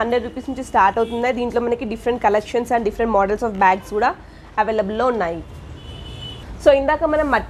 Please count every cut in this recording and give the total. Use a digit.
0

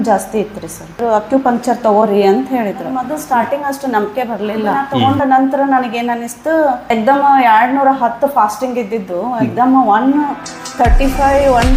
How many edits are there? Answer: 4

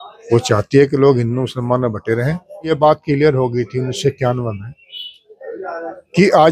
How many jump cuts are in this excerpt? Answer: 1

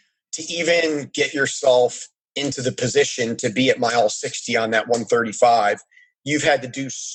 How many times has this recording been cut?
0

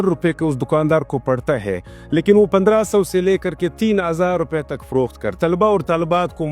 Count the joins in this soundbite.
1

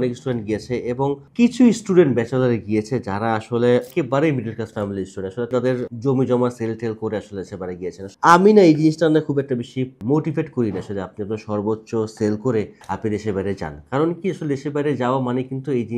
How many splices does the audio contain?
3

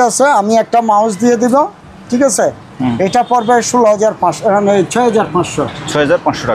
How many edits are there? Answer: 0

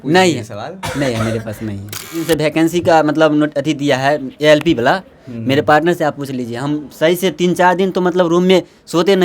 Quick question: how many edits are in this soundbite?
1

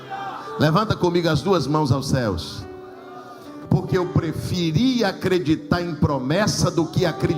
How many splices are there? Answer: 1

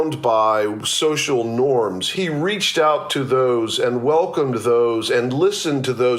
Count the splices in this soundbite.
1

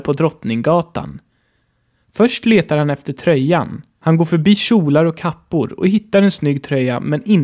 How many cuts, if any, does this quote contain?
2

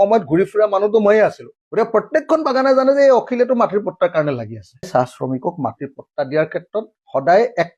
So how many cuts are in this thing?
1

